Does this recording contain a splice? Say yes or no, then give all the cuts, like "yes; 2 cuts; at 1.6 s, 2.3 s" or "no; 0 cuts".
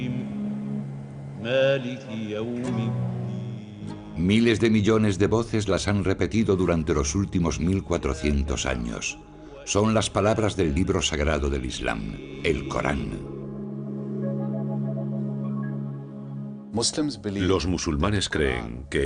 yes; 1 cut; at 12.2 s